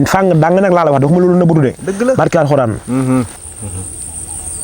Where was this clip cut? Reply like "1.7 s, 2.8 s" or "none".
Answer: 3.4 s